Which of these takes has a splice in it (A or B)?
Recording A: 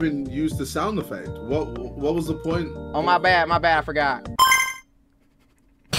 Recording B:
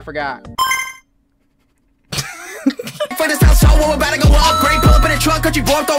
B